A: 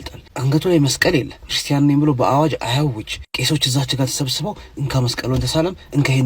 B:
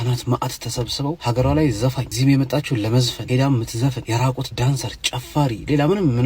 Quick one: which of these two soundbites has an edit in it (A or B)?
B